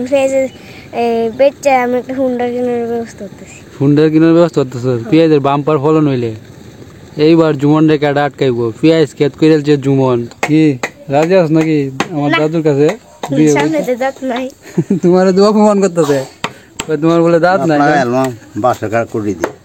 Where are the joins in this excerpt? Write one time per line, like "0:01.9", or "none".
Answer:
0:10.3

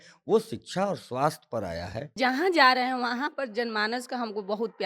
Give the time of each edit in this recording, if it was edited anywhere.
0:02.1

